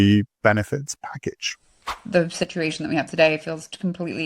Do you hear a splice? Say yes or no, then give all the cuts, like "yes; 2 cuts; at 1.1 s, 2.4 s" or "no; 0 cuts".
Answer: yes; 1 cut; at 1.9 s